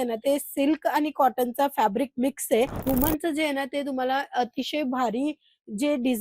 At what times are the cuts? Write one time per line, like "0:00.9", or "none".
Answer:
0:02.8

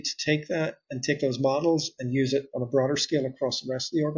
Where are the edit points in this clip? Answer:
none

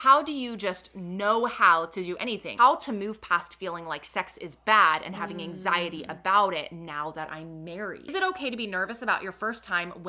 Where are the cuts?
0:02.4
0:08.1

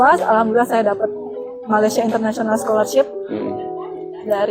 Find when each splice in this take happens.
none

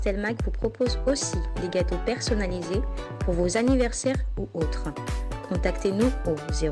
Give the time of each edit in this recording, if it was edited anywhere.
none

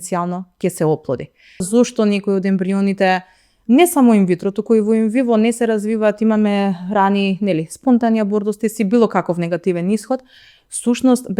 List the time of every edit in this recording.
0:01.7

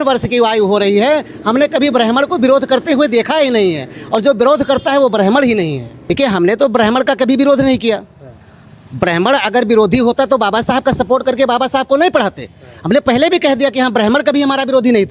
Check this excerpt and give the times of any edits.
0:05.9

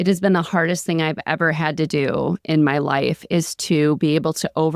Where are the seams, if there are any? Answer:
none

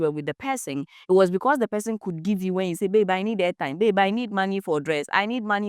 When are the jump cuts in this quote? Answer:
none

